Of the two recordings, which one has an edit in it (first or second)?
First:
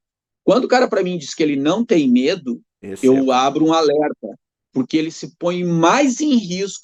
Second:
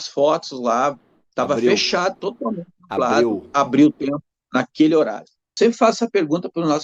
second